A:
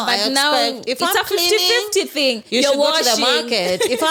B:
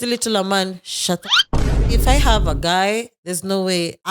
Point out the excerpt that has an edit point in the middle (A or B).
B